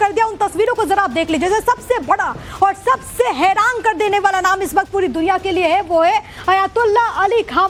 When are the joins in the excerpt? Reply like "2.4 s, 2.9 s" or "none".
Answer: none